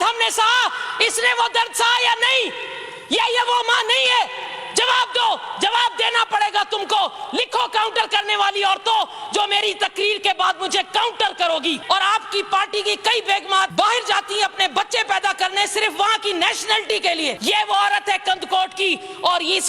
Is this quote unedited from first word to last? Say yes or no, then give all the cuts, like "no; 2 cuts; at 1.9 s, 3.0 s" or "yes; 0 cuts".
no; 3 cuts; at 11.8 s, 13.7 s, 17.4 s